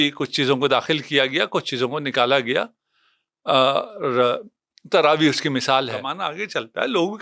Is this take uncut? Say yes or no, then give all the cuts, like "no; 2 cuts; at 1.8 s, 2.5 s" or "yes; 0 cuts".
no; 1 cut; at 6.2 s